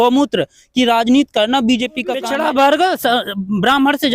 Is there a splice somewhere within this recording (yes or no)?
yes